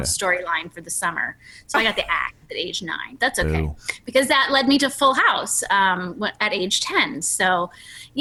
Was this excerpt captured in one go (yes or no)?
yes